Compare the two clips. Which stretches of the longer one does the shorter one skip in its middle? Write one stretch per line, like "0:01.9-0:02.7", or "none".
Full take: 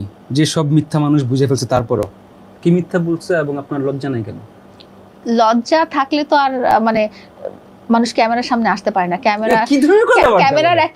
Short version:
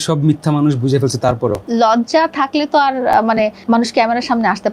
0:02.1-0:05.2
0:07.2-0:07.8